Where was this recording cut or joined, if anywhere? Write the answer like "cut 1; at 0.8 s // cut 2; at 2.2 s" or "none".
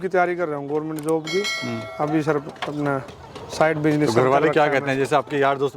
none